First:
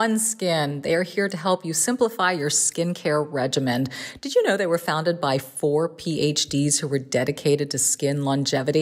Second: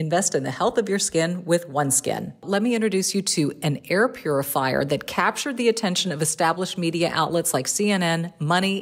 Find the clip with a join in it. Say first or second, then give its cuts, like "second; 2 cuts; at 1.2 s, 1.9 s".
second; 1 cut; at 2.4 s